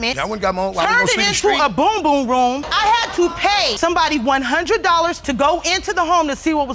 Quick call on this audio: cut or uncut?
uncut